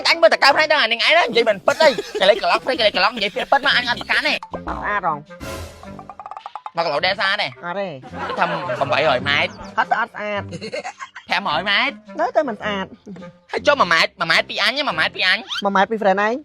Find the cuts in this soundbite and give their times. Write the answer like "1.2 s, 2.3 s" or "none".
4.5 s